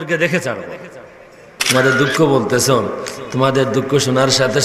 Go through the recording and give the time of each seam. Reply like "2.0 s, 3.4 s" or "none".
1.5 s